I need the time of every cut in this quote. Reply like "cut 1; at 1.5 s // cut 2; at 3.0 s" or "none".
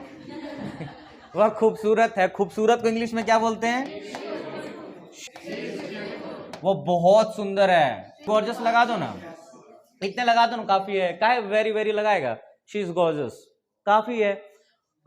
cut 1; at 5.2 s // cut 2; at 8.2 s